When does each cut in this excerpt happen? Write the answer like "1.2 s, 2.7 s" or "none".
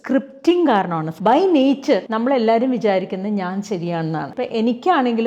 1.0 s, 2.1 s, 4.3 s

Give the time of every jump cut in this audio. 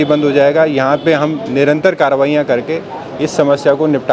none

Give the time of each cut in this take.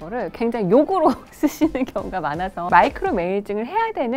2.6 s

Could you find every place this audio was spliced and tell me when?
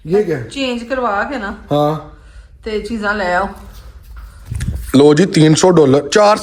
none

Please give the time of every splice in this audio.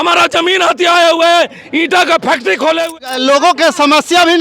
2.9 s

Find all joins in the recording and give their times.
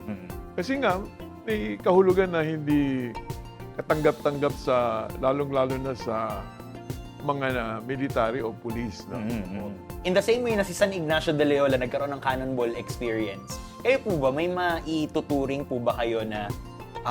9.9 s

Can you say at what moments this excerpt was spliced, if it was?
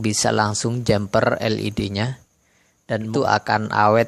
3.1 s

